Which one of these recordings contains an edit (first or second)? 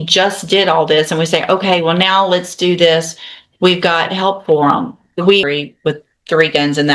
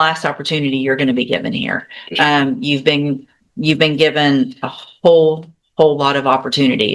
first